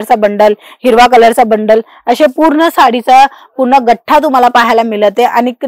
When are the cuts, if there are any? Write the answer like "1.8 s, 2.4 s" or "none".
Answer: none